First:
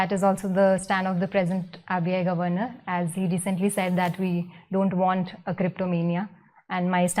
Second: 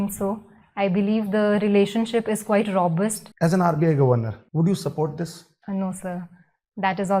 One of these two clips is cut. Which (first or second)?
second